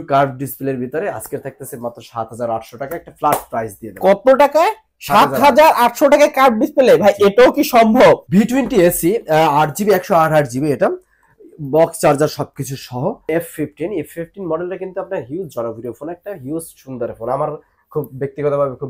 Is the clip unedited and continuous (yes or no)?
no